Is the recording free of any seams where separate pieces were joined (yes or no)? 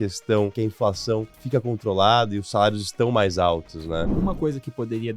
no